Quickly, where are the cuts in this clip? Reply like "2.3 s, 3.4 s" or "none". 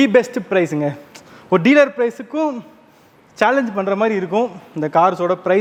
none